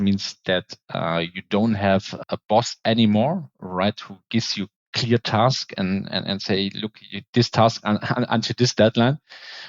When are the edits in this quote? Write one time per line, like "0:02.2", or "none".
0:02.1